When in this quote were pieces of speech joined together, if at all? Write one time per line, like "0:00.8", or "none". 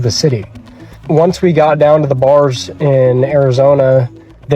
0:00.9